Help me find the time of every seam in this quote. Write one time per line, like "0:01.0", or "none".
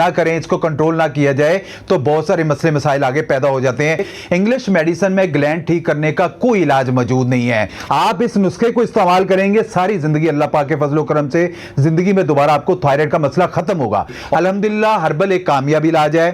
0:04.1
0:07.8
0:14.2

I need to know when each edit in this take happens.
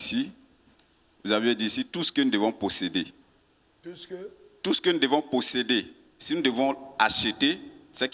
none

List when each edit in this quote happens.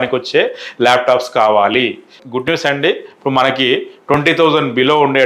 0:02.2

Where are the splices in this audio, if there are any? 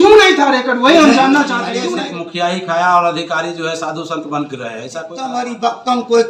0:01.7
0:05.3

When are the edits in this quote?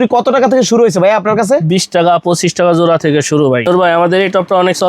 0:03.7

